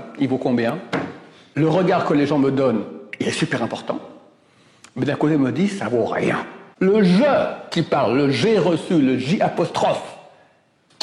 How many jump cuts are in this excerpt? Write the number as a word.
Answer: two